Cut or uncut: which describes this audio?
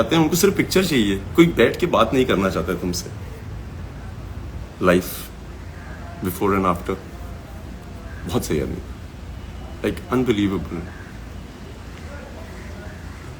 cut